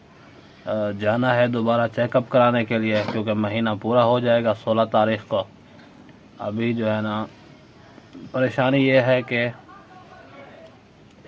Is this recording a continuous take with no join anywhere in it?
yes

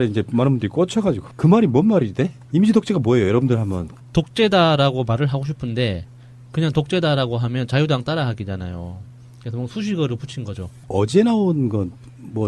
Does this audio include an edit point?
no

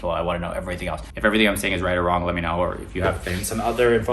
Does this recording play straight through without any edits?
no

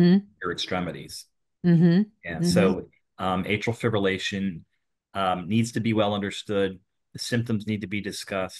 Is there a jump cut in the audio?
no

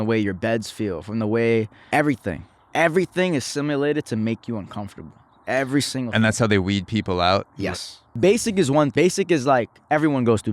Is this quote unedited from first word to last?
no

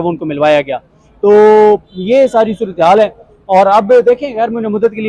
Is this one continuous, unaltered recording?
yes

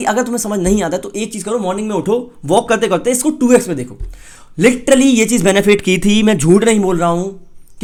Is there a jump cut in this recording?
no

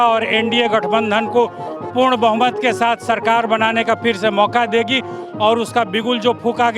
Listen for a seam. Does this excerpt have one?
no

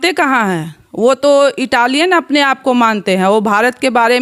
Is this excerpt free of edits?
yes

